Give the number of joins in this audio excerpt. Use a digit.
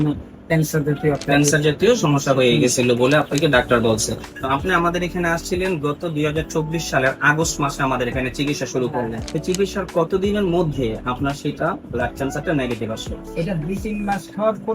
2